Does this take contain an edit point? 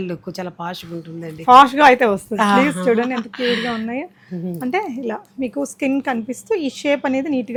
no; 0 cuts

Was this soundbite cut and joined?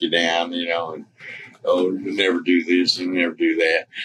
no; 0 cuts

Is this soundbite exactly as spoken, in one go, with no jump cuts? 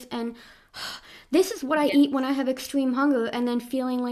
yes; 0 cuts

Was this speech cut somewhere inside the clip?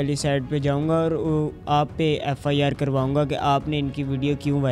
no; 0 cuts

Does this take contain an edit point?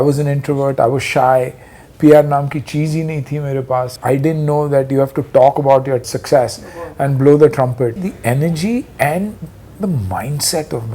yes; 4 cuts; at 4.0 s, 6.1 s, 8.1 s, 9.6 s

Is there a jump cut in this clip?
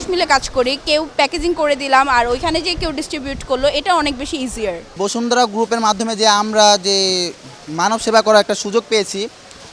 no; 0 cuts

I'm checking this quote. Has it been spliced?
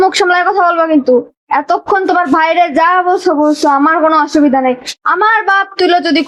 no; 0 cuts

